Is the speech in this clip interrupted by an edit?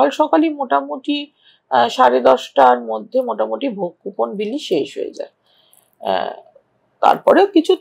no; 0 cuts

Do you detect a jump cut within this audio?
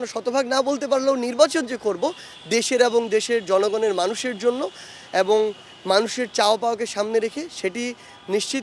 no; 0 cuts

